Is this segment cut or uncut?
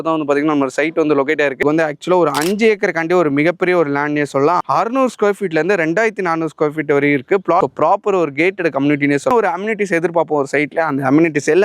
cut